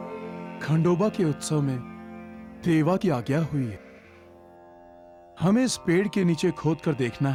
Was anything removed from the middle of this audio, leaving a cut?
no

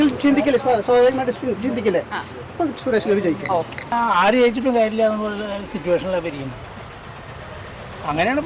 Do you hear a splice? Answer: yes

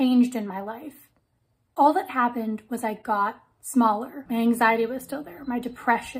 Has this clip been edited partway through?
yes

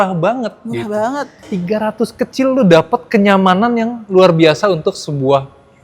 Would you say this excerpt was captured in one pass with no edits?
no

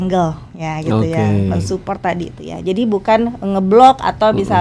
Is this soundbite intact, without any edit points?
yes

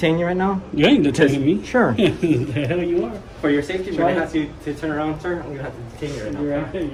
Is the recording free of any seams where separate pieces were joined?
yes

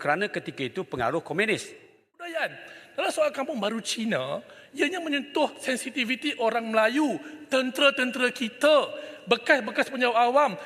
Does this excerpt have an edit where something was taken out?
yes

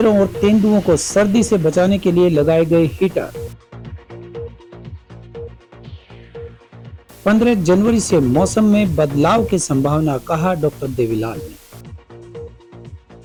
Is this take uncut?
yes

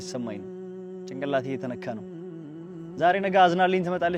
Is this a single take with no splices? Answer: yes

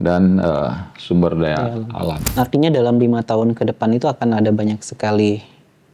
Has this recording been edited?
yes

